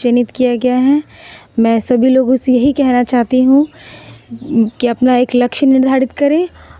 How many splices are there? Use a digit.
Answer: 0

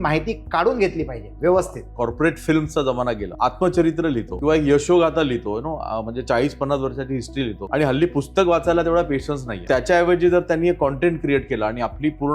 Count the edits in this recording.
5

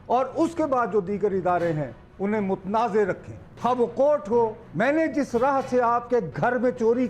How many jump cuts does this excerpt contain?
1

